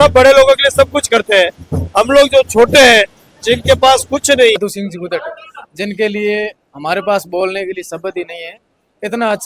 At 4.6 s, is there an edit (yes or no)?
yes